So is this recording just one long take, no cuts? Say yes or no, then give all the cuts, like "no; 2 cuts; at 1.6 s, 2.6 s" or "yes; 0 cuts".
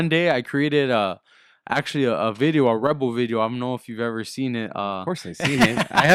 yes; 0 cuts